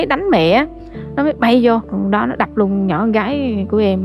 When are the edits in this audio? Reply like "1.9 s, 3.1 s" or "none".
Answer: 1.9 s